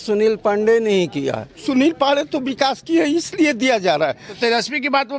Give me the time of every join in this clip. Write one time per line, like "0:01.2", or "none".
0:01.6
0:04.3